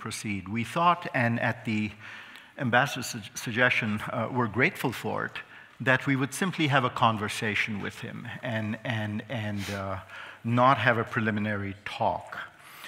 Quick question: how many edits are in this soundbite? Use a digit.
0